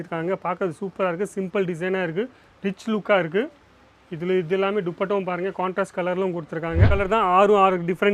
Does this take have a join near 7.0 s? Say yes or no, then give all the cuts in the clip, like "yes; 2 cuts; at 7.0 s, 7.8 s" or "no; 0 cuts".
yes; 1 cut; at 7.0 s